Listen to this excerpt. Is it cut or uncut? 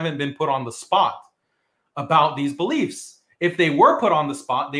uncut